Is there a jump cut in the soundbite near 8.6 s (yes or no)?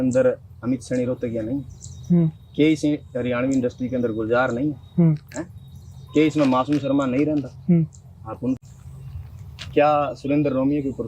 yes